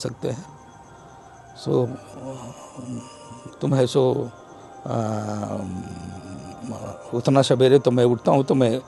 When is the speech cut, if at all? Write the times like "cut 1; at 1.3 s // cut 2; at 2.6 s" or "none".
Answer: none